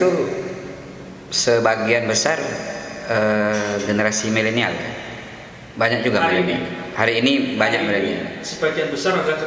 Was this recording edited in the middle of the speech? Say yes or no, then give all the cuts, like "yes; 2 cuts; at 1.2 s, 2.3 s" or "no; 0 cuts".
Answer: no; 0 cuts